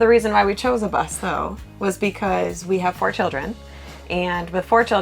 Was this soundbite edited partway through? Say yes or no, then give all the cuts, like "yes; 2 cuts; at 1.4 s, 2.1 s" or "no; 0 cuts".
no; 0 cuts